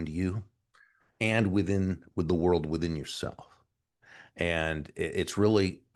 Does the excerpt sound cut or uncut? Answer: uncut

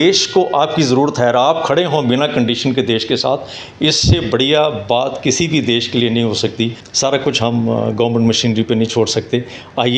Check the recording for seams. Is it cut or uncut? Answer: cut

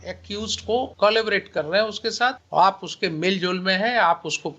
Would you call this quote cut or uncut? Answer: cut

